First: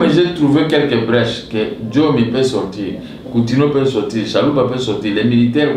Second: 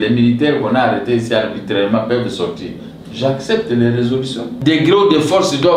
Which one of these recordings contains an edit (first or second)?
second